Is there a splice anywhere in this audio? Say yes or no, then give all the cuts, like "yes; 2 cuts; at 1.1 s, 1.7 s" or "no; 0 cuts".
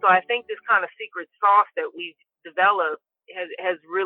no; 0 cuts